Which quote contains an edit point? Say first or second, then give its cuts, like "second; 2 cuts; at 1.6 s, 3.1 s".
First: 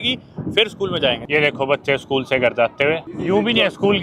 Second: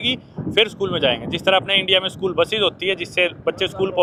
first; 2 cuts; at 1.2 s, 3.1 s